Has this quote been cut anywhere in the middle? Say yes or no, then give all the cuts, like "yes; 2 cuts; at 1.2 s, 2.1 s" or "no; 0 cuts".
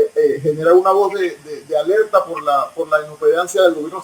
no; 0 cuts